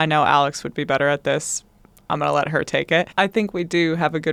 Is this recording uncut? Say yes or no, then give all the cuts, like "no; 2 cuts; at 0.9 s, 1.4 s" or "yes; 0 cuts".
yes; 0 cuts